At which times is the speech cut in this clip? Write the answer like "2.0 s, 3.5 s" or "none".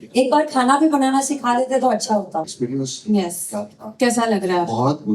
2.5 s